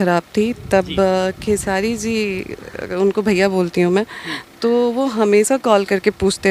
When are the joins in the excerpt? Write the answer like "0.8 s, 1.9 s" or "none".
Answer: none

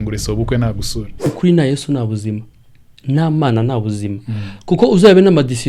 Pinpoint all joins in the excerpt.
1.3 s

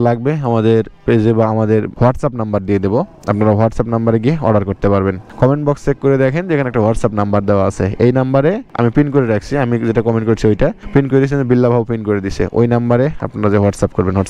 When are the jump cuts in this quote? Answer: none

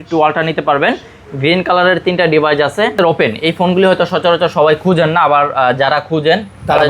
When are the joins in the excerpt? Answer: 2.9 s

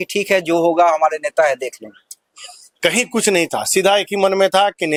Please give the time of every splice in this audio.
none

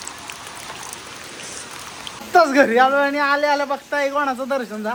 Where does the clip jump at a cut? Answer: none

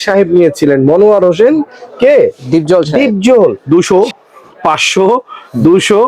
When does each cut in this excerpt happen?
3.6 s

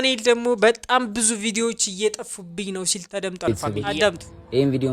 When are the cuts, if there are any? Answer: 3.5 s

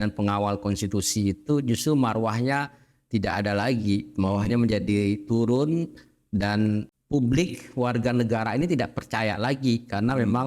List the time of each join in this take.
7.0 s

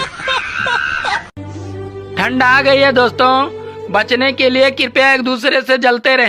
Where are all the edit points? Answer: none

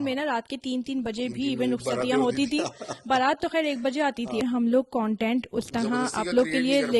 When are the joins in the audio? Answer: 4.4 s

